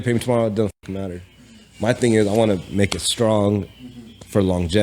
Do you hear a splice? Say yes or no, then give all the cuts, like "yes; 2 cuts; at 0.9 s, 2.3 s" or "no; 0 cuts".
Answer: no; 0 cuts